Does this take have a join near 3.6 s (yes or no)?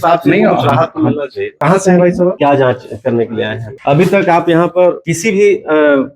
yes